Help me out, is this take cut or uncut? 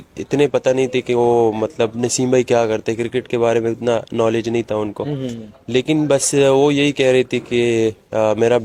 uncut